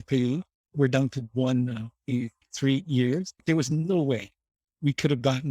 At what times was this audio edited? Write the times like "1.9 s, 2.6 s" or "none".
2.4 s, 3.4 s